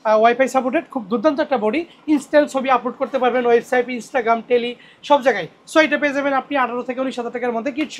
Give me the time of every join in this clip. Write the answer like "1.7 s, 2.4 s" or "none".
none

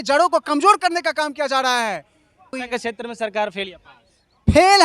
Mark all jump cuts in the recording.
2.6 s

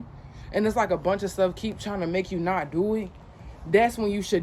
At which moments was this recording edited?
none

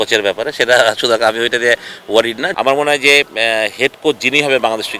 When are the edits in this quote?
2.5 s

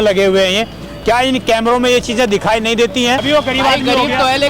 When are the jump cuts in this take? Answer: 3.2 s

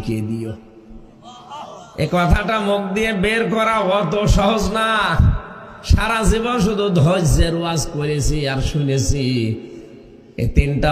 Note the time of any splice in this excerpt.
none

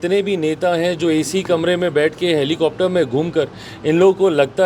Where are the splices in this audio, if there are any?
none

